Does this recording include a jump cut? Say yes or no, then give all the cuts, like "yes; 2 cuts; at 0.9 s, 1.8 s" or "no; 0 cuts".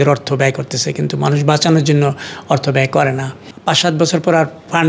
yes; 1 cut; at 3.5 s